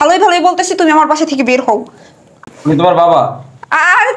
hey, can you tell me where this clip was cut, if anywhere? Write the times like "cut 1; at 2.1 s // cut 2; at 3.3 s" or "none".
cut 1; at 2.4 s